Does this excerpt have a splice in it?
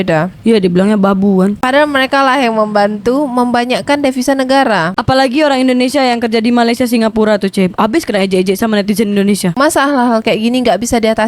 yes; 2 cuts; at 1.6 s, 9.5 s

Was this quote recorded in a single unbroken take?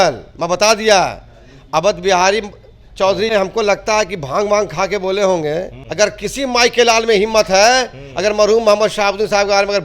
no; 2 cuts; at 3.3 s, 5.8 s

